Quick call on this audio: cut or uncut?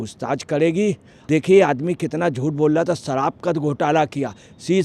cut